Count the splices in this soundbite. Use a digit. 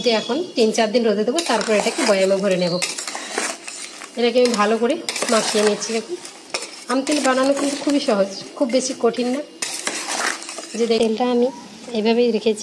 1